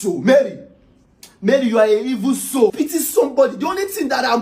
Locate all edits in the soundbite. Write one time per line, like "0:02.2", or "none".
0:02.7